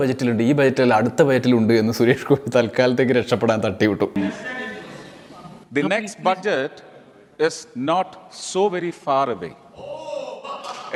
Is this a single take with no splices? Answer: yes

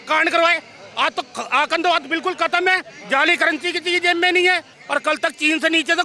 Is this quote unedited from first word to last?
no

